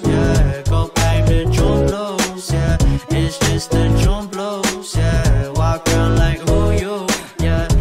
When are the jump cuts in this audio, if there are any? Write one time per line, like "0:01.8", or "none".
0:00.9